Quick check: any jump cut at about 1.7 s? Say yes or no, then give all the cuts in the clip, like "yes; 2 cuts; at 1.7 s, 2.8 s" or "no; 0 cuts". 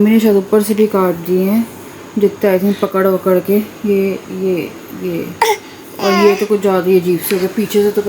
no; 0 cuts